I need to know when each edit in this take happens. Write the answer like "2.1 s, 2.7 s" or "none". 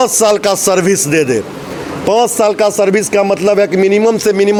none